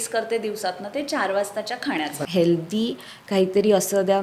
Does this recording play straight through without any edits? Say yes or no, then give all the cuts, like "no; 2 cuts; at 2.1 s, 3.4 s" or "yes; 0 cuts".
no; 1 cut; at 2.2 s